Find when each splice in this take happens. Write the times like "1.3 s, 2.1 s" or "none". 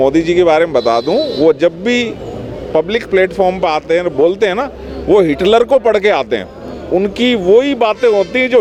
none